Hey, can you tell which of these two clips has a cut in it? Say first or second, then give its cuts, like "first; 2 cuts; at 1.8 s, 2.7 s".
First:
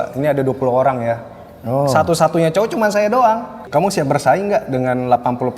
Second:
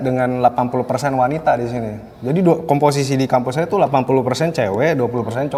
first; 1 cut; at 3.6 s